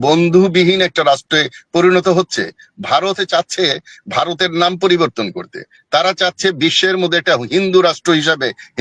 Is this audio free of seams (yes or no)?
yes